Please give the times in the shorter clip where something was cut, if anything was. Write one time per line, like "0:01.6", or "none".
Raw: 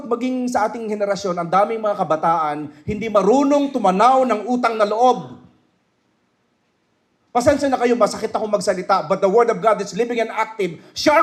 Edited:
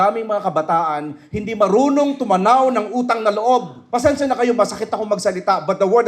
0:03.8